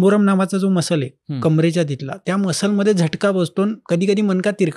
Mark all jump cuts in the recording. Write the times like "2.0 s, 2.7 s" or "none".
2.2 s, 3.8 s